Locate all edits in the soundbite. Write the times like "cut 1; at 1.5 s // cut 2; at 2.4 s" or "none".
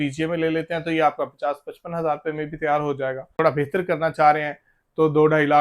cut 1; at 3.3 s